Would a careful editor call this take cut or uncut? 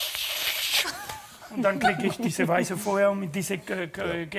uncut